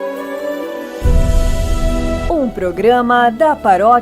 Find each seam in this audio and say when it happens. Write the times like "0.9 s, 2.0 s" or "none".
2.3 s